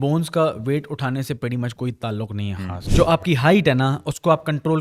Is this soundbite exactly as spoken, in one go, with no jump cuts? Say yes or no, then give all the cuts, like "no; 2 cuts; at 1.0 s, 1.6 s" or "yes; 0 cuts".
no; 1 cut; at 2.8 s